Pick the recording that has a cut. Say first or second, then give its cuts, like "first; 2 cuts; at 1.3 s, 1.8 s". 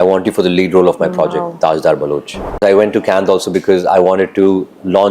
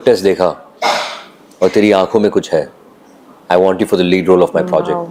first; 1 cut; at 2.6 s